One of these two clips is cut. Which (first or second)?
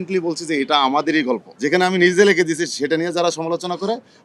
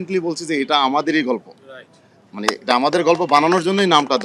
first